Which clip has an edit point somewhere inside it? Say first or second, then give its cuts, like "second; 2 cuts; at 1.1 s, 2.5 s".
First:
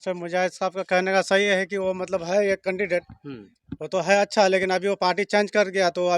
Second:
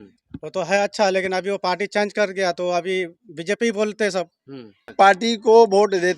second; 1 cut; at 4.9 s